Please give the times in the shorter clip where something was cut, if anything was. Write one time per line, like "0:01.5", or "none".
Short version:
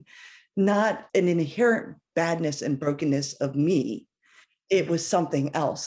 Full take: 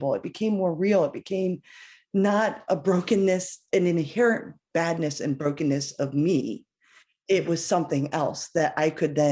0:01.0